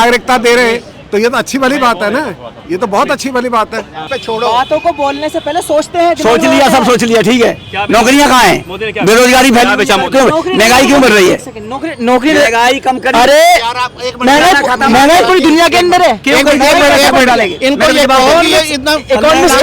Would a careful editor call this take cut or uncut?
cut